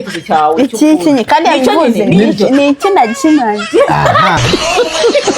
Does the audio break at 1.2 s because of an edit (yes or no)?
no